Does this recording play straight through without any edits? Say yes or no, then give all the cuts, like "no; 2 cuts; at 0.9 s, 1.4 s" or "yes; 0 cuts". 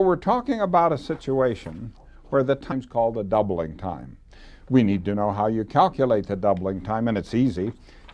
yes; 0 cuts